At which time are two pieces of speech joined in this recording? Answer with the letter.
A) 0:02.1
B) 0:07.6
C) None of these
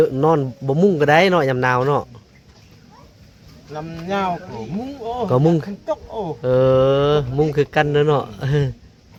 C